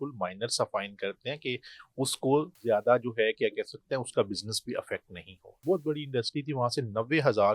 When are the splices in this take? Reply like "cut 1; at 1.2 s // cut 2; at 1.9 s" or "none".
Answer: cut 1; at 2.5 s // cut 2; at 5.5 s